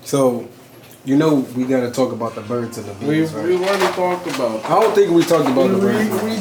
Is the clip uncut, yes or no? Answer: yes